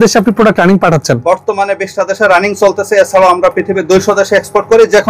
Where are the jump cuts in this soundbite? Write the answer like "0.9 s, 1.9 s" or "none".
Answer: none